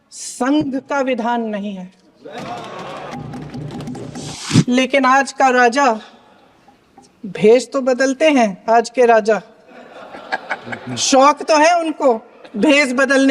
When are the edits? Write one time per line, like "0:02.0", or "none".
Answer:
0:04.4